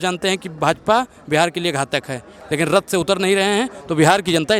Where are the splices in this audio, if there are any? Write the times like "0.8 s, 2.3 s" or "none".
none